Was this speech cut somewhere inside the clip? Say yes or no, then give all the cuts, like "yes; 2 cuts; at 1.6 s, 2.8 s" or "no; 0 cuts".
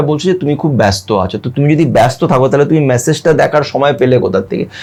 no; 0 cuts